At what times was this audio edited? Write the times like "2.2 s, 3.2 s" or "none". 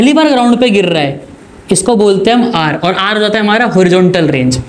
none